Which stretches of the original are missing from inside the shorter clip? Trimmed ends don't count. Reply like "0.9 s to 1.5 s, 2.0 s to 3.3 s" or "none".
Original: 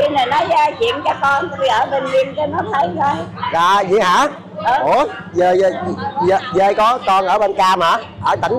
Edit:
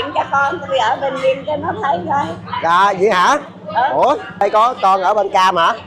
5.3 s to 6.7 s

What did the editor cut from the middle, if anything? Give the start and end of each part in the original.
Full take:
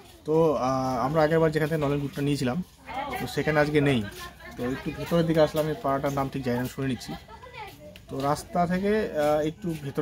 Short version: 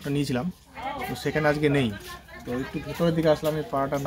none

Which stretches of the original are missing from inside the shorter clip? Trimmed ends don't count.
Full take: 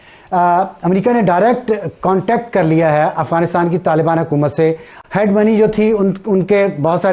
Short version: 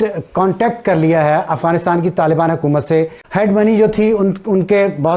4.9 s to 5.0 s

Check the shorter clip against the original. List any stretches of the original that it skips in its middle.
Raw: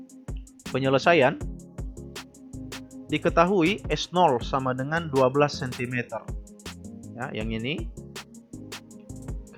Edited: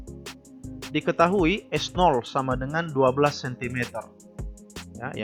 2.8 s to 3.1 s

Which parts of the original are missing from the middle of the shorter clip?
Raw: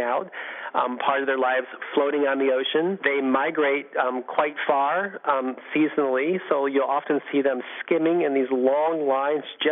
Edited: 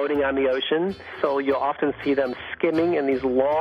3.1 s to 6.3 s

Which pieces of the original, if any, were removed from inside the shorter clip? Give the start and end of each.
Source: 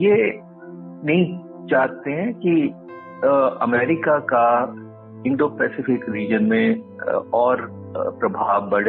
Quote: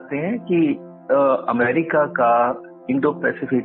2.8 s to 3.0 s, 4.8 s to 5.1 s

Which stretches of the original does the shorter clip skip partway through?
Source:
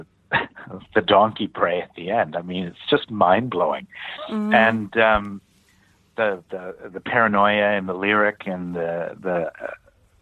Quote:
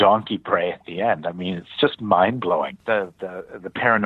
3.9 s to 6.1 s

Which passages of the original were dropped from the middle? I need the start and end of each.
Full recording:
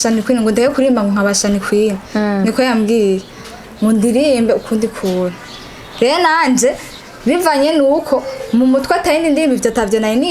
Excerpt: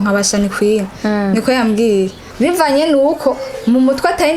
3.3 s to 7.1 s

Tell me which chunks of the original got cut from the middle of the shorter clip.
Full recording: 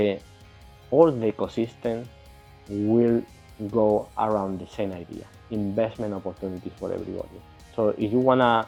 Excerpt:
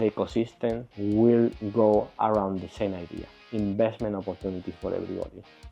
2.1 s to 2.6 s, 3.3 s to 3.6 s

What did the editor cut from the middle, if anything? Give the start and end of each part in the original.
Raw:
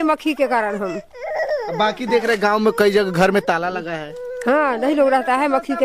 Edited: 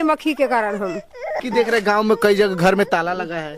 1.4 s to 2.0 s

